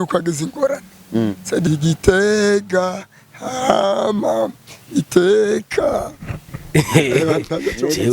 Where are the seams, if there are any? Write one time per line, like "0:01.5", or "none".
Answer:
0:01.7